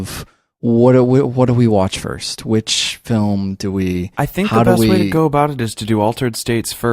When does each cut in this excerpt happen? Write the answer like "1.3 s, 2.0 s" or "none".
5.0 s